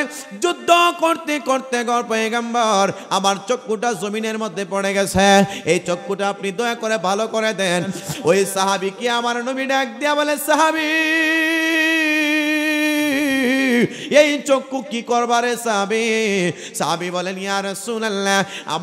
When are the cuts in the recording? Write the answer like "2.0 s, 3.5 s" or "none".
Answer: 8.1 s